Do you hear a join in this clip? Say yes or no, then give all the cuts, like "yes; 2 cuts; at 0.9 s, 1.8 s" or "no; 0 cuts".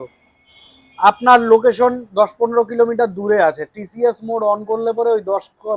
no; 0 cuts